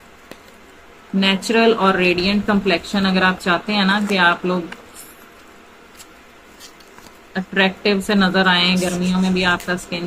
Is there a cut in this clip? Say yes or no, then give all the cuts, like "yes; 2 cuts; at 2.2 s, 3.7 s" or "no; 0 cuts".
no; 0 cuts